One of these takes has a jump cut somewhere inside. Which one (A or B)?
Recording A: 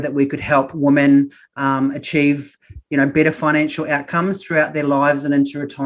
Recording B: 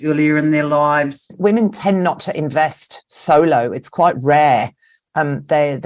B